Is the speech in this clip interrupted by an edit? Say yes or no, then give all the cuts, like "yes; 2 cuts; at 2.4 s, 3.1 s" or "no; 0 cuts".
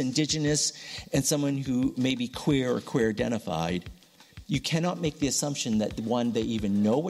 no; 0 cuts